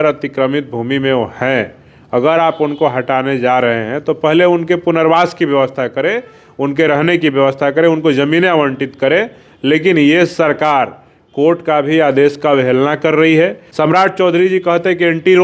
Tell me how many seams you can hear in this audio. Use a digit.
1